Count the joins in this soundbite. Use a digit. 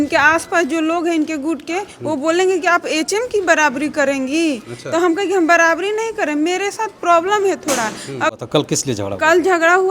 1